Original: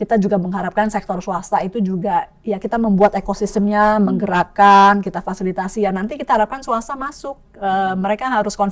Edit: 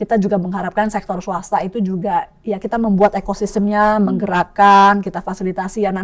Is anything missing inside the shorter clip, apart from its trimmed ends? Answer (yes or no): no